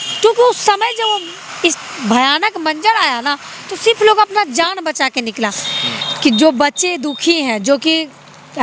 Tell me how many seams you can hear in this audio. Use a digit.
1